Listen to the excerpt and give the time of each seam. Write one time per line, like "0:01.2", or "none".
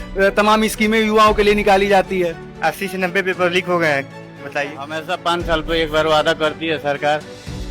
0:05.0